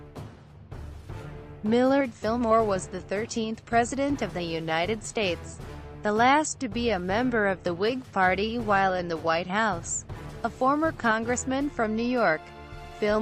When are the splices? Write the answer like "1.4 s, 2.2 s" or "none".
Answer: none